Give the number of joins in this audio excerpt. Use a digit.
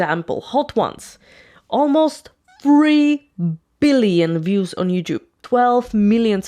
1